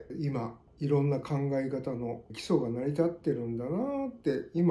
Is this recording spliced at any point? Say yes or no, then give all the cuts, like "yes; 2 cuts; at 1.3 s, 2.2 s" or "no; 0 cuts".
no; 0 cuts